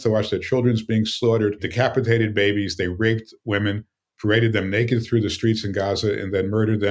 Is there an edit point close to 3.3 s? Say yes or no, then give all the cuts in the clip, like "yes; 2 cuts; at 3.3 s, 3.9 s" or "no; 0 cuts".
no; 1 cut; at 1.6 s